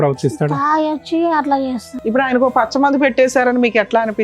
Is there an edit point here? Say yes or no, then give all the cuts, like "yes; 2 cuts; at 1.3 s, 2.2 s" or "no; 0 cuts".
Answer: yes; 1 cut; at 1.9 s